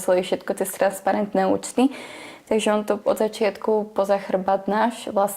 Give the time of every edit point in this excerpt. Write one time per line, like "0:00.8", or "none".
none